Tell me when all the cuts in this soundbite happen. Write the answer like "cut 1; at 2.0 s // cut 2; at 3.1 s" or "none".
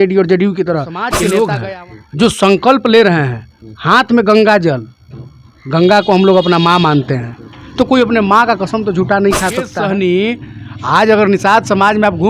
cut 1; at 1.1 s // cut 2; at 9.7 s